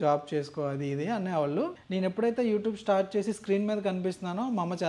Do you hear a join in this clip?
yes; 1 cut; at 1.8 s

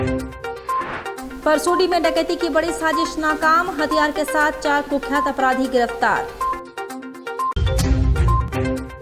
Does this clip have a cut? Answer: no; 0 cuts

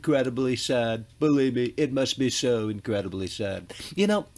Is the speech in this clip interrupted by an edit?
no; 0 cuts

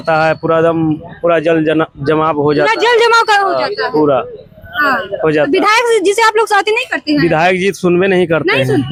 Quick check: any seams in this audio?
no; 0 cuts

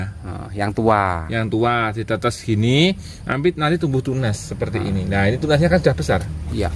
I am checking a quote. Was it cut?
no; 0 cuts

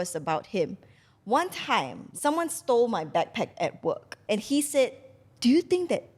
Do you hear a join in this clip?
yes; 2 cuts; at 2.0 s, 4.1 s

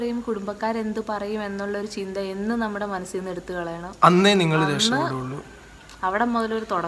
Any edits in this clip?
no; 0 cuts

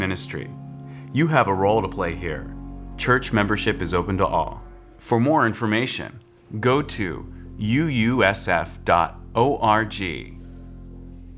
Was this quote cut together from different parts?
yes; 1 cut; at 10.3 s

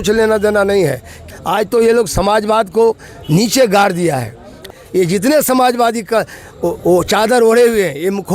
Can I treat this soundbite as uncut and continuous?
no; 2 cuts; at 1.2 s, 4.6 s

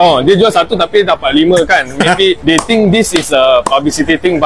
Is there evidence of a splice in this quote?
no; 0 cuts

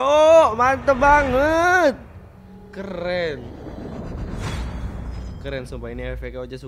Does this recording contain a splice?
no; 0 cuts

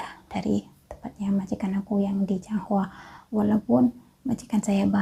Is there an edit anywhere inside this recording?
no; 0 cuts

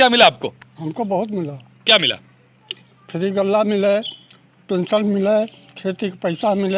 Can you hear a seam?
no; 0 cuts

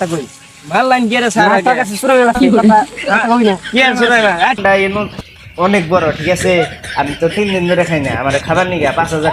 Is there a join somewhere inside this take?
yes; 1 cut; at 4.6 s

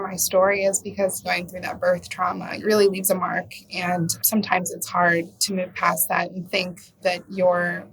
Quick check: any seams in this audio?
yes; 4 cuts; at 1.2 s, 2.5 s, 4.2 s, 7.0 s

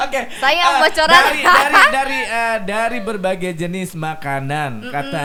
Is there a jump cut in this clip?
no; 0 cuts

